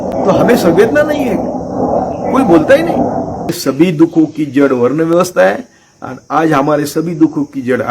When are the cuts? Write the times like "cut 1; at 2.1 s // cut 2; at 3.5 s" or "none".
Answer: cut 1; at 3.6 s